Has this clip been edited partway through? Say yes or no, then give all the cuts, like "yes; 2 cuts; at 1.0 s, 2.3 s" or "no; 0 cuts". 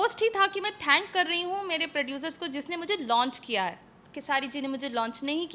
no; 0 cuts